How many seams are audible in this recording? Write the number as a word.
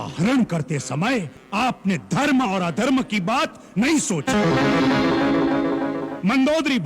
one